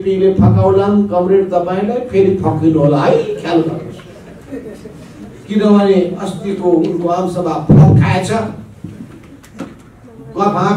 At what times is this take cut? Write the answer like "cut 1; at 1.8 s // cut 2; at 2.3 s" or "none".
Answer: none